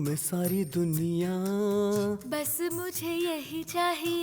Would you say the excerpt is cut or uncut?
cut